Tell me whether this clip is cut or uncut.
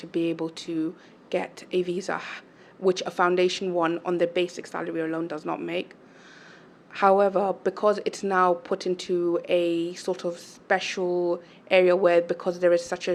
uncut